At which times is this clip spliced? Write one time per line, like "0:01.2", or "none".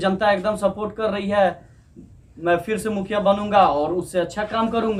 none